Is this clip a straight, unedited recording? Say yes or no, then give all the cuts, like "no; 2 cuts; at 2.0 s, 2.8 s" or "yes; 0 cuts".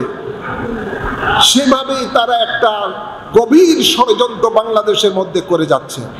yes; 0 cuts